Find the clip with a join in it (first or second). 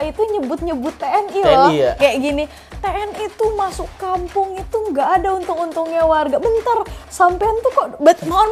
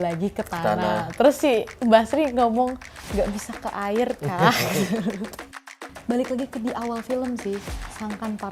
second